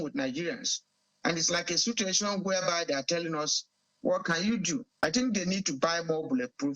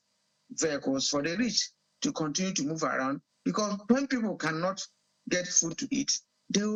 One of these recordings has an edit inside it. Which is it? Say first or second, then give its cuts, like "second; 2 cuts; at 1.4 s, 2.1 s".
first; 1 cut; at 4.9 s